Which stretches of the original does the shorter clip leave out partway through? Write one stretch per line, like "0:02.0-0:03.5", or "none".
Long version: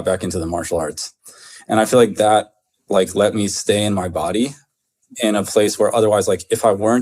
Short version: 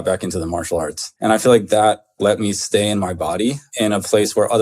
0:01.0-0:01.5
0:02.6-0:03.1
0:04.6-0:05.1